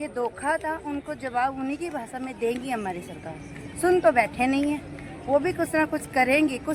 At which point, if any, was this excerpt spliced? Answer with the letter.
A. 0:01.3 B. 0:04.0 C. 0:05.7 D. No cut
D